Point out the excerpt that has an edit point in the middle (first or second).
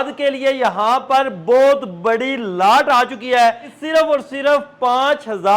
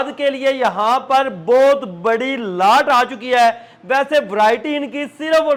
first